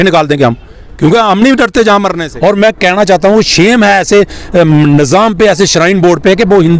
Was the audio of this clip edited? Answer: yes; 1 cut; at 2.2 s

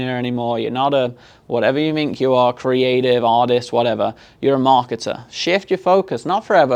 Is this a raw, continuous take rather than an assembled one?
yes; 0 cuts

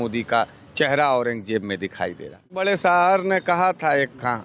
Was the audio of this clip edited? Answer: yes; 1 cut; at 2.6 s

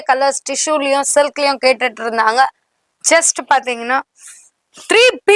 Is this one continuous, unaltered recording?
yes; 0 cuts

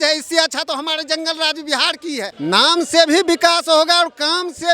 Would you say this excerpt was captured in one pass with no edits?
no; 1 cut; at 2.3 s

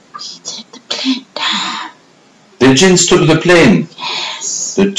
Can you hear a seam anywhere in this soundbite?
no; 0 cuts

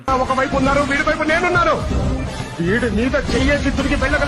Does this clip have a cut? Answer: no; 0 cuts

